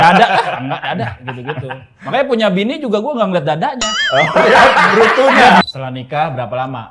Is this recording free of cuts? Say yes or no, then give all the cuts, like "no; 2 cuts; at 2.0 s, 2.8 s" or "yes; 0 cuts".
no; 1 cut; at 5.6 s